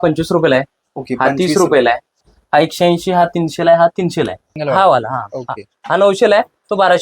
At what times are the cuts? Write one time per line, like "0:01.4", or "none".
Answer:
0:02.3
0:04.5